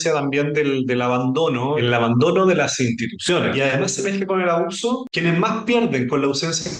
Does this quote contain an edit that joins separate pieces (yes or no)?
yes